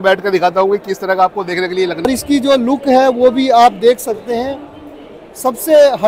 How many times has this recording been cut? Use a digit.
1